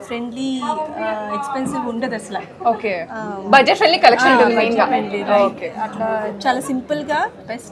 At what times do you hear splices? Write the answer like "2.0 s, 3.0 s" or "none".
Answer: none